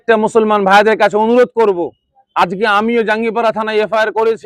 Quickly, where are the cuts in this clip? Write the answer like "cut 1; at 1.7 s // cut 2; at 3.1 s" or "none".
none